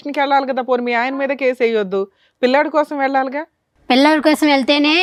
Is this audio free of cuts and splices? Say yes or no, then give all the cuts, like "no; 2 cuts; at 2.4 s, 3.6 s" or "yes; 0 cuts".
yes; 0 cuts